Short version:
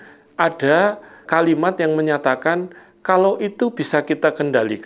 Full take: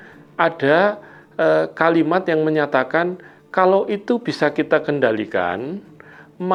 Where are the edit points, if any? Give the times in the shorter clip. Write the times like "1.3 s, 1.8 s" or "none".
1.2 s